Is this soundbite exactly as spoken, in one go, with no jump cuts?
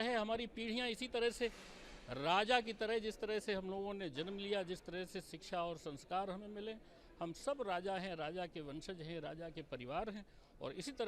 yes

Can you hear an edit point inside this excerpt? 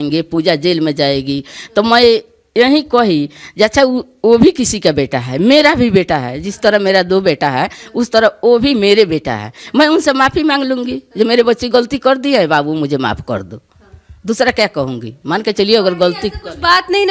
no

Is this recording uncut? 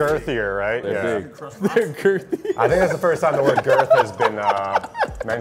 yes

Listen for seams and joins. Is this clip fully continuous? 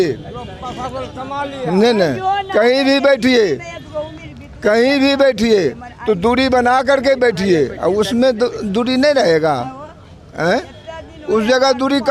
yes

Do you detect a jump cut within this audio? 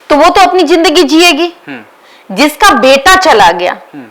no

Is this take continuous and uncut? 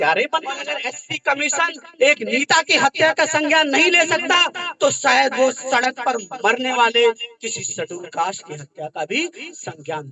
no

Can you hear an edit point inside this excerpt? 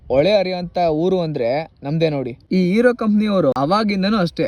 yes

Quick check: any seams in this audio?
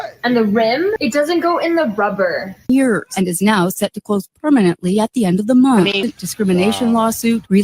yes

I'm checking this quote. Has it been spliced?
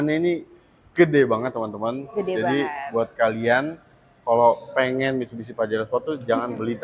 no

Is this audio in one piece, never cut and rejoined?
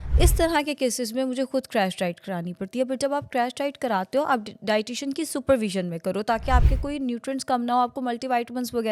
yes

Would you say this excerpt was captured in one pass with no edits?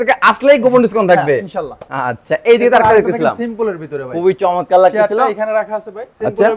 yes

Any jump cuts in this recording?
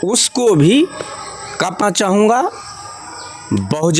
yes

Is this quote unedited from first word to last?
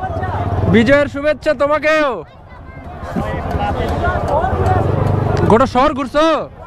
yes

